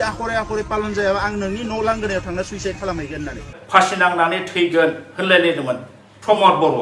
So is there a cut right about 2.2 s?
no; 1 cut; at 3.6 s

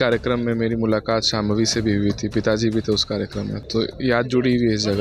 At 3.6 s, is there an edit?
yes; 1 cut; at 3.6 s

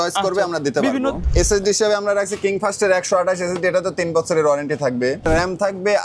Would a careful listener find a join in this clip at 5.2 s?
yes; 2 cuts; at 1.2 s, 5.2 s

